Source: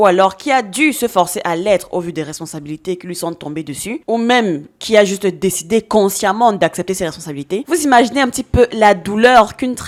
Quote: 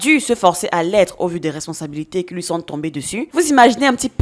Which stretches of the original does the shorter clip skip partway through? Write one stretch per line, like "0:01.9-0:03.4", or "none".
0:04.0-0:07.6